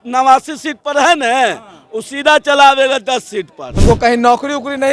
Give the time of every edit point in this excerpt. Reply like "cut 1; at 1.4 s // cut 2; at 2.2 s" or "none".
cut 1; at 3.6 s

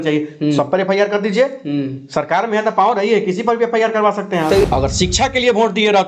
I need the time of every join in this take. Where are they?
cut 1; at 4.7 s

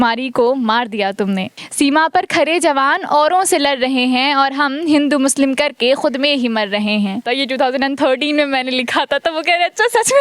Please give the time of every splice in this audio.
cut 1; at 1.6 s // cut 2; at 7.3 s

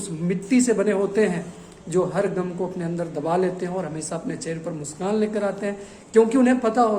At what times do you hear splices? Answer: none

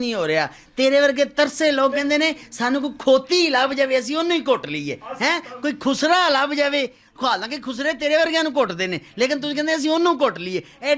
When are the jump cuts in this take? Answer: none

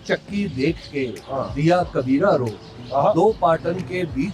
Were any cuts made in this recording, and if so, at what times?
none

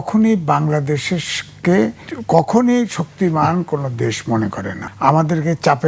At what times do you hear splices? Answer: cut 1; at 2.1 s // cut 2; at 4.8 s

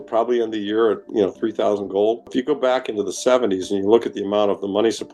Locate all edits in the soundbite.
cut 1; at 2.3 s

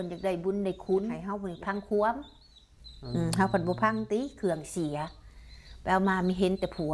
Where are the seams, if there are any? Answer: cut 1; at 1.7 s

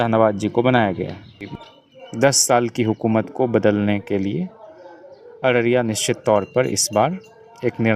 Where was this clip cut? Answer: cut 1; at 1.5 s

